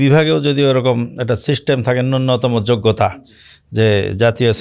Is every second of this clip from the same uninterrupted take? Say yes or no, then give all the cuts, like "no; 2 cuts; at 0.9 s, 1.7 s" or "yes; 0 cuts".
yes; 0 cuts